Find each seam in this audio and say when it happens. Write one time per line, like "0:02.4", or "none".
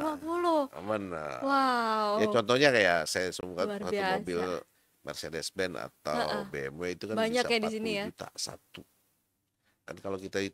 none